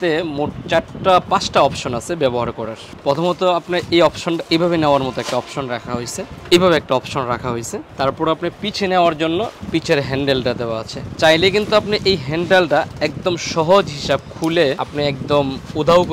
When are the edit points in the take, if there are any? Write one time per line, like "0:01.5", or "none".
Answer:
none